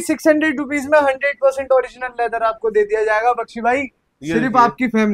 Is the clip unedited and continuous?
yes; 0 cuts

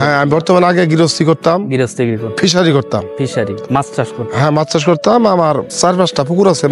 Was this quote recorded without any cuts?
no; 1 cut; at 5.7 s

